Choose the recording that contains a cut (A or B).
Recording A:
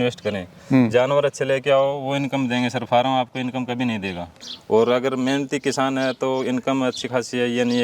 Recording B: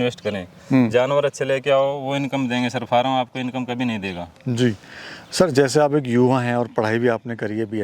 A